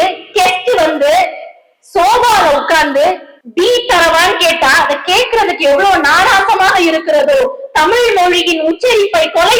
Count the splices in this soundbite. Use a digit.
0